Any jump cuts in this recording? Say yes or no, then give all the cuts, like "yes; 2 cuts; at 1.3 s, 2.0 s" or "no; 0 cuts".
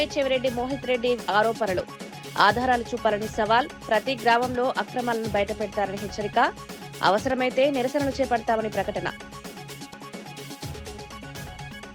no; 0 cuts